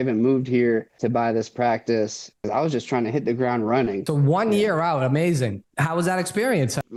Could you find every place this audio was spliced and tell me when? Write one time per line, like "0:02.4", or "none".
none